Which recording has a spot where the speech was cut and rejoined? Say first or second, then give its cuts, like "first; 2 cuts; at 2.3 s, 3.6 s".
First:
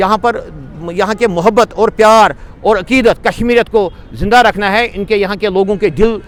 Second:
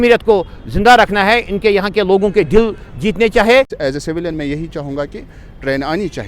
second; 1 cut; at 3.7 s